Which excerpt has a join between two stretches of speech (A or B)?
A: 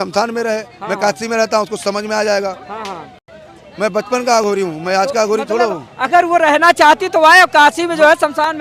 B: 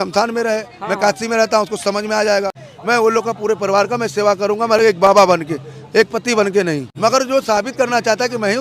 B